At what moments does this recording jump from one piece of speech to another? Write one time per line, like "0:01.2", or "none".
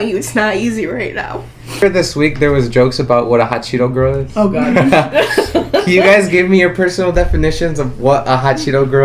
0:01.8